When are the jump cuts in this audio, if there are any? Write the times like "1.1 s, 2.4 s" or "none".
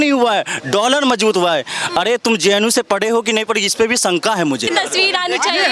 4.7 s